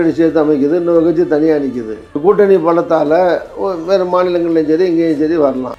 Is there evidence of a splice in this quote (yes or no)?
no